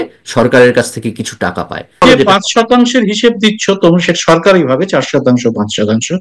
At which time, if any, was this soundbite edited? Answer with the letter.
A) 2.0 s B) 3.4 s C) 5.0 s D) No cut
A